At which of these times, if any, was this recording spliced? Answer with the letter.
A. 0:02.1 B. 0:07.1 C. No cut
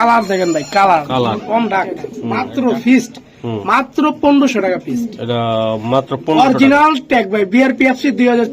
A